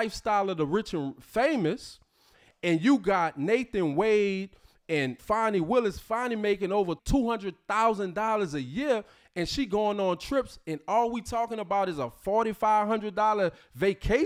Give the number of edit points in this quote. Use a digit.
0